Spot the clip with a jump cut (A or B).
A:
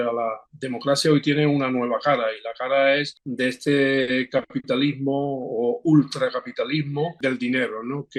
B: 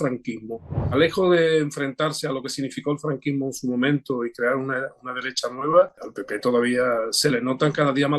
B